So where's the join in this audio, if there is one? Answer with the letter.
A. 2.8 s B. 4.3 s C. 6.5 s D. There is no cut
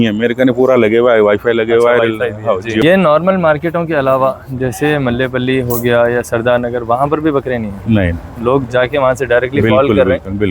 A